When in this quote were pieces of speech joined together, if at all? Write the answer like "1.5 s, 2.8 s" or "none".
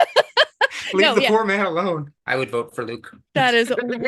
2.1 s